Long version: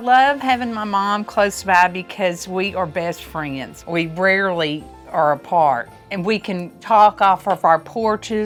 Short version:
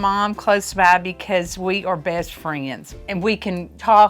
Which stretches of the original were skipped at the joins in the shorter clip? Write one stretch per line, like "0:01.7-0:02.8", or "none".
0:03.8-0:05.9